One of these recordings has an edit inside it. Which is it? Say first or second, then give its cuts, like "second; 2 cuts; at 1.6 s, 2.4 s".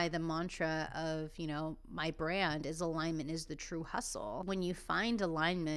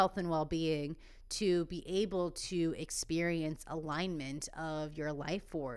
first; 1 cut; at 4.4 s